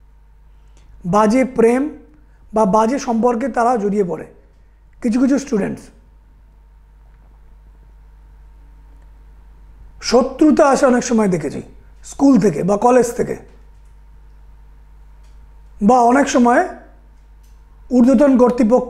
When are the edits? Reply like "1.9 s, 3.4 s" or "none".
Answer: none